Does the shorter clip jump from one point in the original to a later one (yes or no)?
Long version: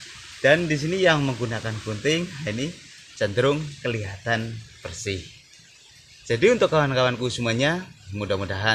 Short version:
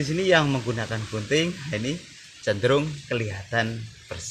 no